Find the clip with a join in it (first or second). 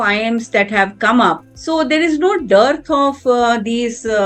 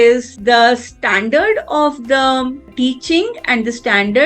second